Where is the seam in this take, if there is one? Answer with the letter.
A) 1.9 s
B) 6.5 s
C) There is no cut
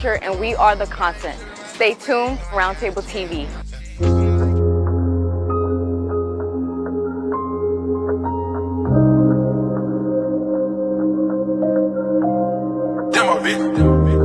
C